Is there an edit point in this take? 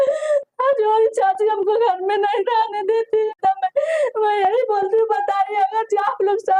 yes; 1 cut; at 3.4 s

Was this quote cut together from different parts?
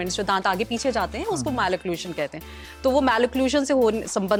no; 0 cuts

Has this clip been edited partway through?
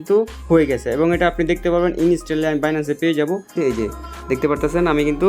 yes; 1 cut; at 3.5 s

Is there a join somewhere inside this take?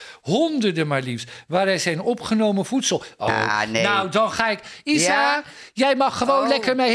yes; 1 cut; at 3.3 s

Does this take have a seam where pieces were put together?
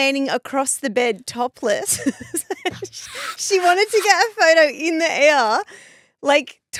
no; 0 cuts

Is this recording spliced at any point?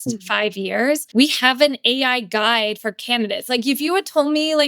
yes; 1 cut; at 1.1 s

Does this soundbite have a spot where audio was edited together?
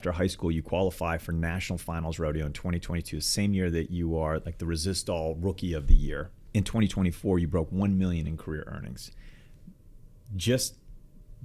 yes; 1 cut; at 6.3 s

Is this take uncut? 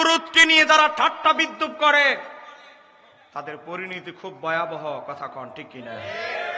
yes; 0 cuts

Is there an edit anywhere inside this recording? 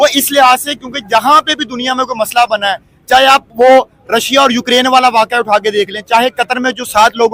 no; 0 cuts

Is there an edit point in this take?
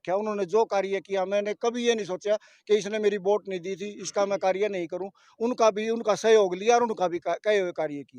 no; 0 cuts

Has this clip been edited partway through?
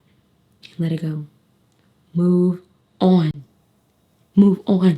no; 0 cuts

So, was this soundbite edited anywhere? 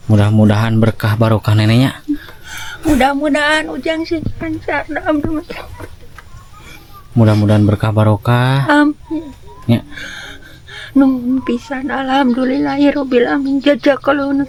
no; 0 cuts

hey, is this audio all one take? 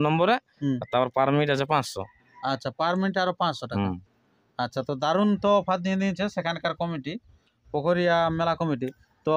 yes; 0 cuts

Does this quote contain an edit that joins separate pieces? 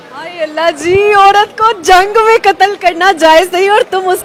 no; 0 cuts

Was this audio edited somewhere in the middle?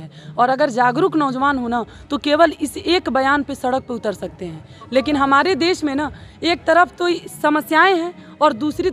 no; 0 cuts

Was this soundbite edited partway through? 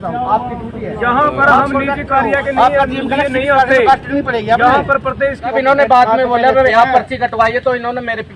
yes; 1 cut; at 5.5 s

